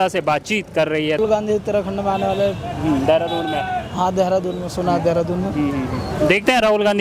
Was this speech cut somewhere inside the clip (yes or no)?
yes